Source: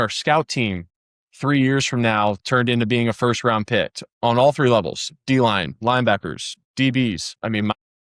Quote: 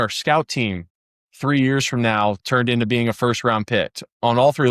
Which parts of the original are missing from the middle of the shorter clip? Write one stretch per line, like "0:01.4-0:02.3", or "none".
none